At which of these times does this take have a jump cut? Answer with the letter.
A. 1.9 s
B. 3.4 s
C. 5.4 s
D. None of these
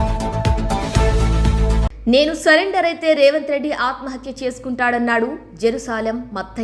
A